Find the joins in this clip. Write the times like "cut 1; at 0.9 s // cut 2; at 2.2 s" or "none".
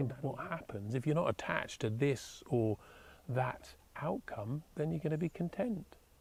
none